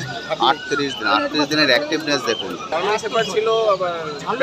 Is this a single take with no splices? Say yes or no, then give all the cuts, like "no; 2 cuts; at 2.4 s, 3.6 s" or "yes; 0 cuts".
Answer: no; 1 cut; at 2.6 s